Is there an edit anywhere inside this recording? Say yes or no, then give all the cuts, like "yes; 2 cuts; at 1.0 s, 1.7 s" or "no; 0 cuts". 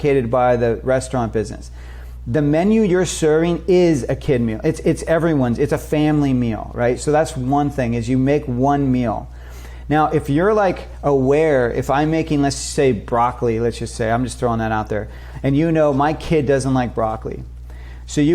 no; 0 cuts